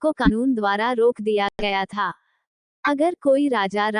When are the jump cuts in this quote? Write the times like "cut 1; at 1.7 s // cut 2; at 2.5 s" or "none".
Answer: none